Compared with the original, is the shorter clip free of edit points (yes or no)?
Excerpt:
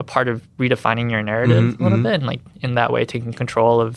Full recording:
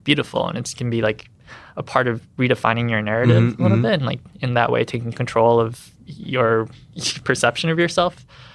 yes